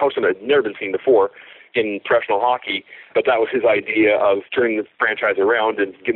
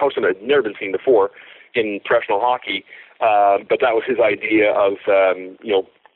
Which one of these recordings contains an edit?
first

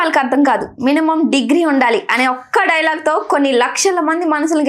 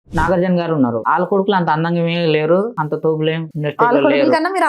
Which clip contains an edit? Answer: second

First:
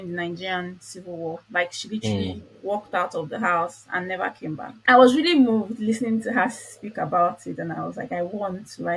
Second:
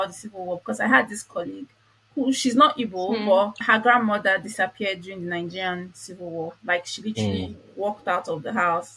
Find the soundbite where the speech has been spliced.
first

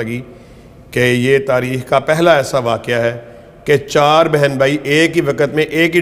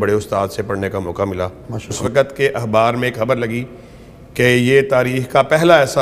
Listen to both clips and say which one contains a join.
second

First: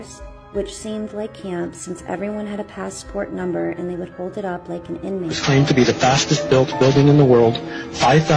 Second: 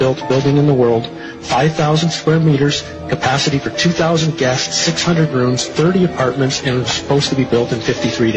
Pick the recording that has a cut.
first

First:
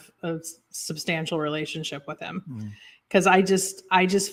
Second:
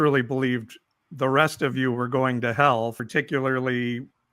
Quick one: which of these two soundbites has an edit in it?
second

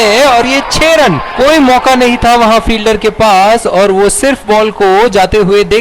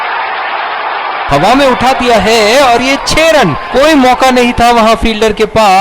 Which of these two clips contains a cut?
second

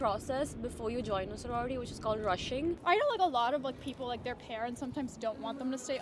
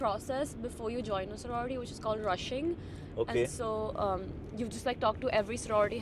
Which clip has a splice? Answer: first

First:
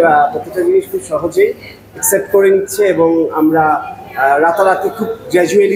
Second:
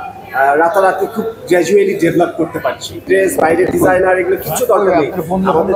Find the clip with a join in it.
second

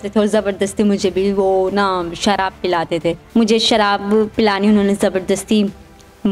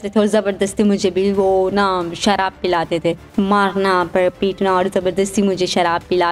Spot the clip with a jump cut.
second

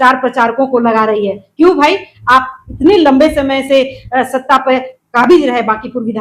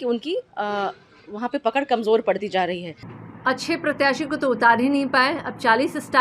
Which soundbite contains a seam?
second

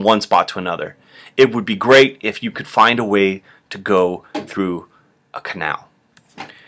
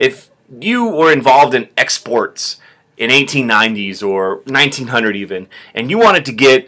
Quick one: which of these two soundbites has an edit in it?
second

